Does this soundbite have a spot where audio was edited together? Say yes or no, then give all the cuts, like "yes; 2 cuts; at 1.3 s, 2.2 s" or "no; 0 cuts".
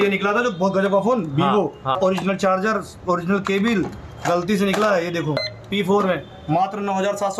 yes; 2 cuts; at 2.0 s, 5.4 s